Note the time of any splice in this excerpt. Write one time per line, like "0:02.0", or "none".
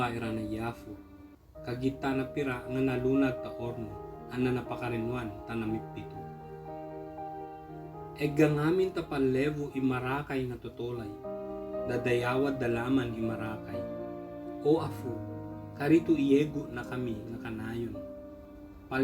0:05.8
0:08.2